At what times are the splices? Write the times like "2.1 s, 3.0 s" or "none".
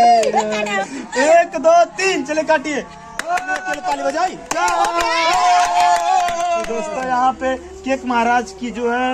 3.8 s, 6.8 s